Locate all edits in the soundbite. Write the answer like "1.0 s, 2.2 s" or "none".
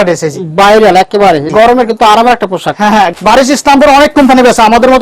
1.5 s, 3.1 s